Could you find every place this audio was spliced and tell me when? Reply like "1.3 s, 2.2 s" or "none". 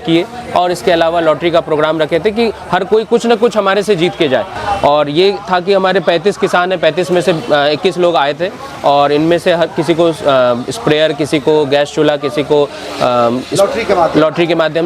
none